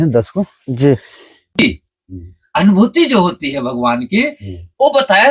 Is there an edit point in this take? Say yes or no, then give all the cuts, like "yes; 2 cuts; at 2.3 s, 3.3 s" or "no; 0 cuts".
yes; 1 cut; at 1.4 s